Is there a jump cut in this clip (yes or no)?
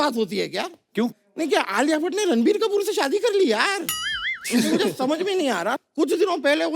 yes